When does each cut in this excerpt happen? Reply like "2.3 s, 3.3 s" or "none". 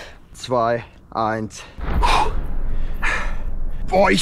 none